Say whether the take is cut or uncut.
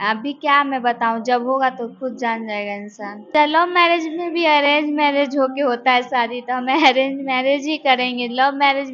cut